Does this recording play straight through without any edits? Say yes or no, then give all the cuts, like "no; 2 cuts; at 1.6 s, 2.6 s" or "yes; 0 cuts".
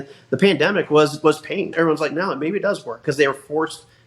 no; 1 cut; at 1.7 s